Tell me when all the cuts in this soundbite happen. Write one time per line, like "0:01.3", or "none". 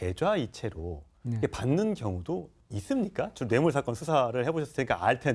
0:01.9